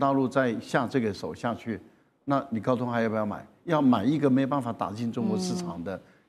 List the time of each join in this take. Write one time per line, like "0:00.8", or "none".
none